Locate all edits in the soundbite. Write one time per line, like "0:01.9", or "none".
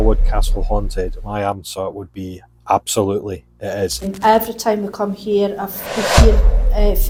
none